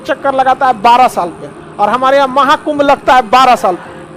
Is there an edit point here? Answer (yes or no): no